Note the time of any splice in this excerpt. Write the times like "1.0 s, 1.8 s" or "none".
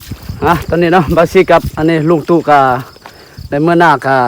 none